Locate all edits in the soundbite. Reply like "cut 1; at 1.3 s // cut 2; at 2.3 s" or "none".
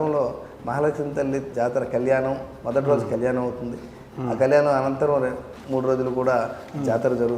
cut 1; at 1.5 s // cut 2; at 5.5 s